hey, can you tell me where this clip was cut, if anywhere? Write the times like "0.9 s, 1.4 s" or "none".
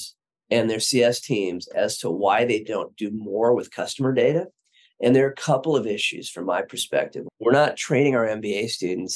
7.2 s